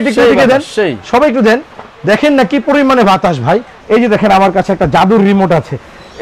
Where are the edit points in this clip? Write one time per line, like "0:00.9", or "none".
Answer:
0:03.7

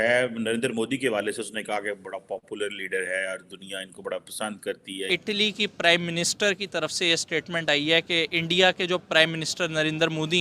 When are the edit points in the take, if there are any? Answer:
0:05.2

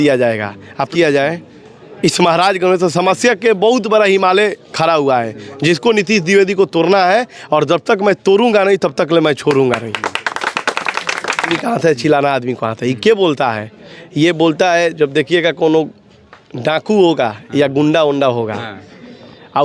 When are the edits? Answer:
0:00.9
0:11.5

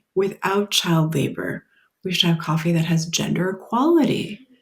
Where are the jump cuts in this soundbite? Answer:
none

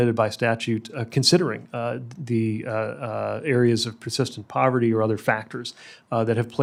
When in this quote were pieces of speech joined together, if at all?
none

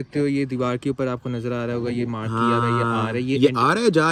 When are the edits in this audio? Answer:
none

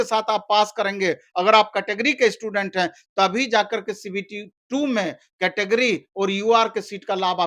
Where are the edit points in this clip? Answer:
none

